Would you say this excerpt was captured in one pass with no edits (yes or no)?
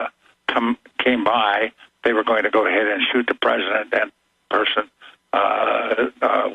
no